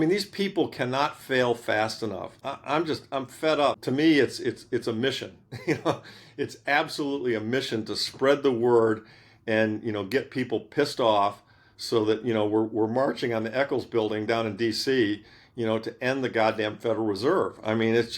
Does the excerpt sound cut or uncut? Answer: cut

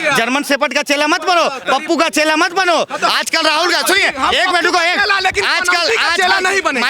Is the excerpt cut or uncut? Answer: uncut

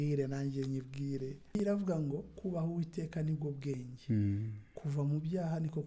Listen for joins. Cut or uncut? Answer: cut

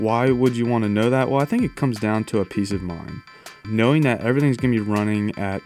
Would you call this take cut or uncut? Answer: cut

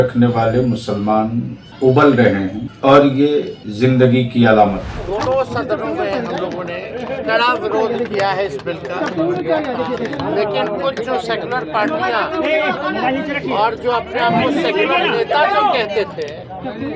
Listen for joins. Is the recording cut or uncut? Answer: cut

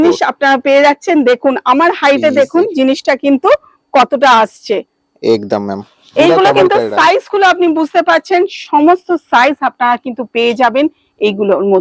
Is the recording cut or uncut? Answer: uncut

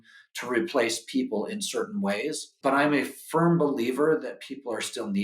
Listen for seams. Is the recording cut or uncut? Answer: cut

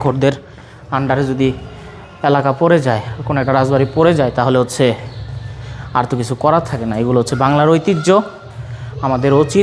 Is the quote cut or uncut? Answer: uncut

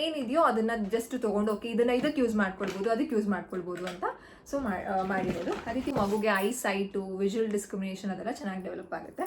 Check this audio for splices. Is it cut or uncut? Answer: cut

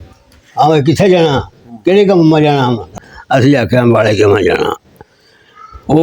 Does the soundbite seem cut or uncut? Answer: cut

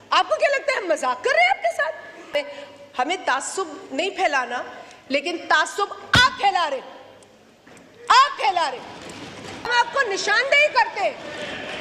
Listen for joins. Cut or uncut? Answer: cut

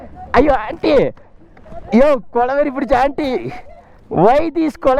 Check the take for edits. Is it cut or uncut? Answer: uncut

